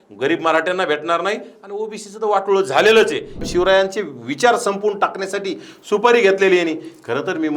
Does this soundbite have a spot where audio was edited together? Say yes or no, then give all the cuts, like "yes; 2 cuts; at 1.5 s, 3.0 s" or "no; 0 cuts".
yes; 1 cut; at 3.4 s